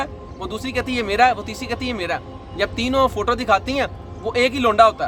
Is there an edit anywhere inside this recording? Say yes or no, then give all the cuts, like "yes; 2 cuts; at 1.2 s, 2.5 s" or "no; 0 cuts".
no; 0 cuts